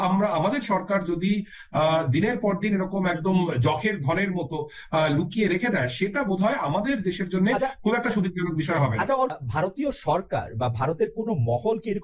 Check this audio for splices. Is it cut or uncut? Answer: uncut